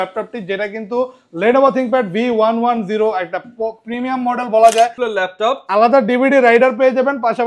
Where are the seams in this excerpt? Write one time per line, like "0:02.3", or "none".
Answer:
0:05.0

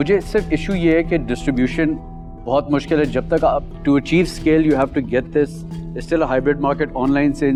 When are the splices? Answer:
none

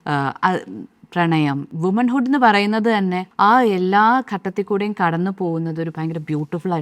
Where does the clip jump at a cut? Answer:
0:01.7
0:03.2

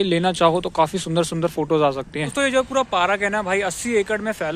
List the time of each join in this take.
0:02.3

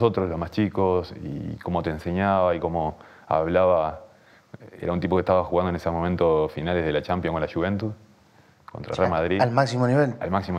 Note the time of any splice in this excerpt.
none

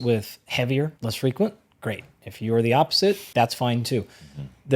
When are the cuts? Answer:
0:01.0
0:03.2

